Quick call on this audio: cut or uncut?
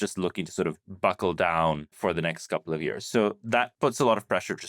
cut